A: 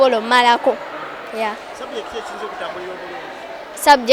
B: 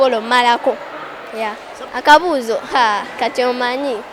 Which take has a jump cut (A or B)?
B